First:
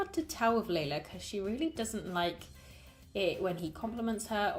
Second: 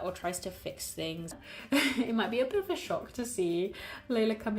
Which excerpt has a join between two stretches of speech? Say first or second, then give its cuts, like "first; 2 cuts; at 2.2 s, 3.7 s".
second; 1 cut; at 1.3 s